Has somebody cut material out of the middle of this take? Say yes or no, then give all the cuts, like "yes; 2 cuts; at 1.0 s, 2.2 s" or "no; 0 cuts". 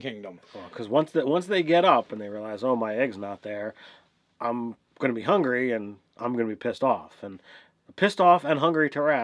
no; 0 cuts